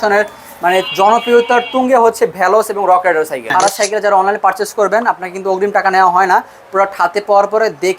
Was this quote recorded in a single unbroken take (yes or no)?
no